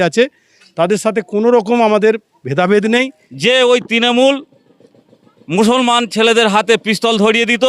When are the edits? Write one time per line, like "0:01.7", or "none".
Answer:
0:03.2